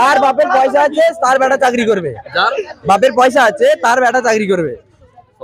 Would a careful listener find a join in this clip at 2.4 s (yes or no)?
no